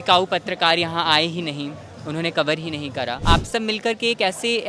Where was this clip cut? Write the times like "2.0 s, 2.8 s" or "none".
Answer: 3.2 s